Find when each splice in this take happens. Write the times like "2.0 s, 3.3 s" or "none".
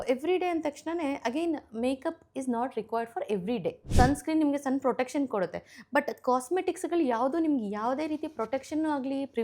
3.8 s